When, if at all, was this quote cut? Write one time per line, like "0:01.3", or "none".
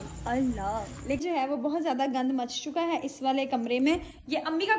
0:01.2